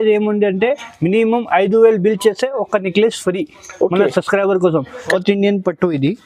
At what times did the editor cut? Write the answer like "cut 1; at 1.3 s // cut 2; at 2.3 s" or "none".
cut 1; at 5.1 s